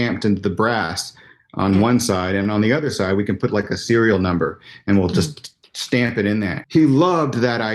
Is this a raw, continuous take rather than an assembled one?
no; 1 cut; at 6.6 s

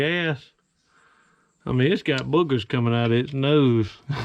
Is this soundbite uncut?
yes; 0 cuts

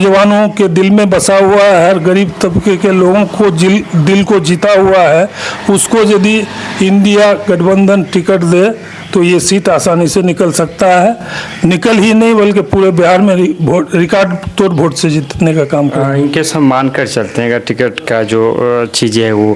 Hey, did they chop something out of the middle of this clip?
no; 0 cuts

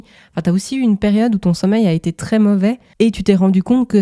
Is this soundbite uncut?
no; 1 cut; at 2.9 s

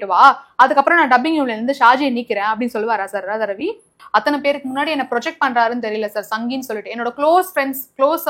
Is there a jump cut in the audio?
yes; 1 cut; at 4.0 s

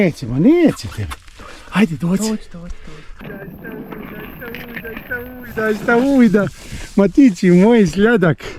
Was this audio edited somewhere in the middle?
yes; 1 cut; at 3.2 s

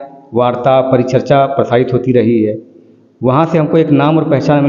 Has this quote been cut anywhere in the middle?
no; 0 cuts

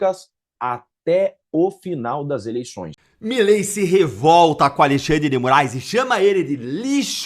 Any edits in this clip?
yes; 1 cut; at 2.9 s

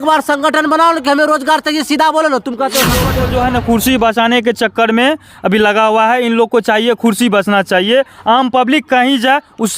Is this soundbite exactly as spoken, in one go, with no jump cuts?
no; 1 cut; at 3.1 s

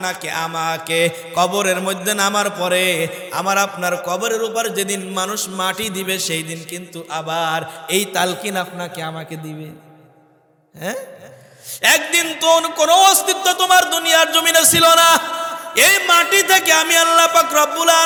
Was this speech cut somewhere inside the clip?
no; 0 cuts

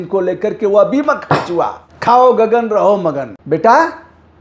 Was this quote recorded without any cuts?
no; 2 cuts; at 1.8 s, 3.3 s

